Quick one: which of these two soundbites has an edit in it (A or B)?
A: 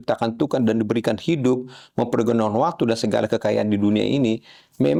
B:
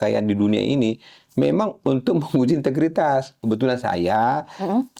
B